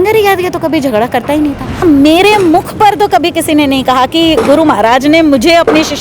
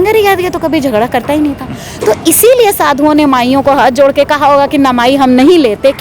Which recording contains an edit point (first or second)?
first